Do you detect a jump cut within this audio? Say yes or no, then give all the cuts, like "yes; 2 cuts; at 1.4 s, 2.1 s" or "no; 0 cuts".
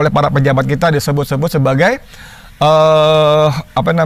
no; 0 cuts